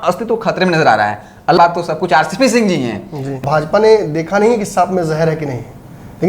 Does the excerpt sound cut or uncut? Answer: cut